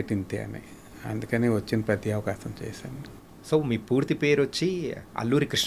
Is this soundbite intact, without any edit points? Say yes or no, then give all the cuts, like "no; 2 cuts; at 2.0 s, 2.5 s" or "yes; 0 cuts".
no; 1 cut; at 3.1 s